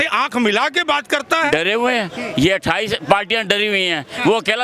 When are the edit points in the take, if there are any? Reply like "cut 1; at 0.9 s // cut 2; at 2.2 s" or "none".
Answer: cut 1; at 1.5 s